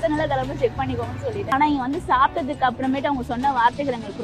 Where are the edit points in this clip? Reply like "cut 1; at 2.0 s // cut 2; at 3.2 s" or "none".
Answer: cut 1; at 1.5 s